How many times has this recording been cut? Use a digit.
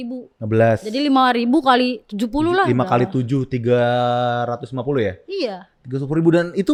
0